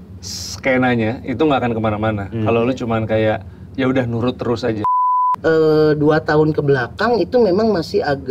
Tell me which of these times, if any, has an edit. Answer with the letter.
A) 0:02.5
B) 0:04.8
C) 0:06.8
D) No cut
B